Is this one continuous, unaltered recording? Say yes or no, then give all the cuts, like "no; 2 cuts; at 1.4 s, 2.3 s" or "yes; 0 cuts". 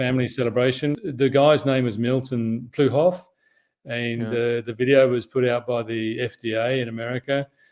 no; 1 cut; at 1.0 s